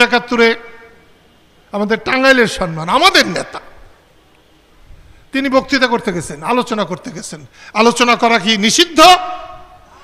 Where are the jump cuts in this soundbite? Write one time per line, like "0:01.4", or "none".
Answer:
none